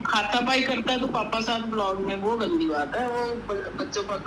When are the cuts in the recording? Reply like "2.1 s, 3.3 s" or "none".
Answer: none